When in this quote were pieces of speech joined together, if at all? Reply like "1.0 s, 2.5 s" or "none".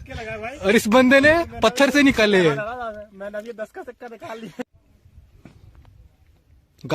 4.6 s